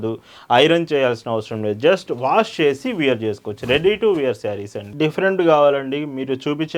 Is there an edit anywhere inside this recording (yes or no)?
yes